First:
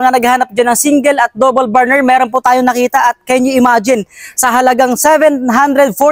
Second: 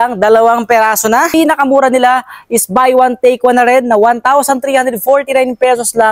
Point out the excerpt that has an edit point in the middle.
second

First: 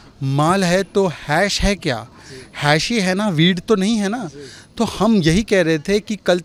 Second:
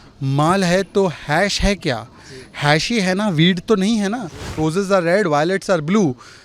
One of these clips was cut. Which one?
second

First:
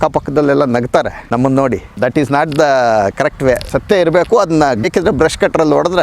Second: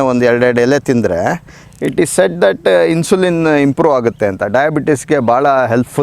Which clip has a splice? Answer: first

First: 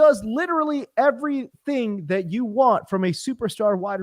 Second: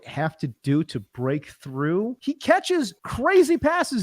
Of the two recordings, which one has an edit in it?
second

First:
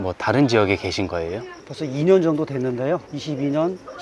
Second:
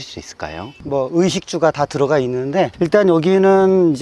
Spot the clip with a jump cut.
first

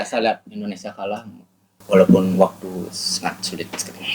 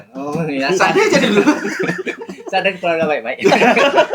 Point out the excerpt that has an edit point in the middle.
first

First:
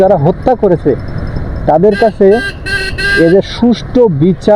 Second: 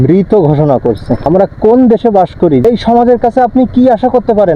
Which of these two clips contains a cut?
second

